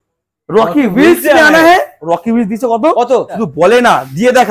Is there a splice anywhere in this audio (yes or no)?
yes